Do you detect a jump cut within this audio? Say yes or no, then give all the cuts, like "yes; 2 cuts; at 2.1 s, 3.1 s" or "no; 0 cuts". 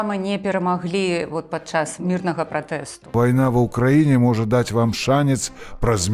yes; 2 cuts; at 1.9 s, 3.1 s